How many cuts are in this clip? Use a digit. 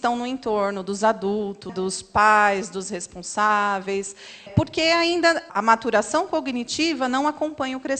3